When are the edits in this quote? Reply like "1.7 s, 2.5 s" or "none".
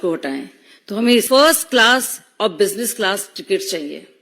1.3 s